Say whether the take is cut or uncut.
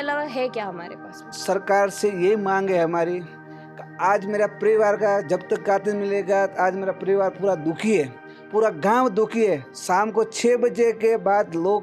cut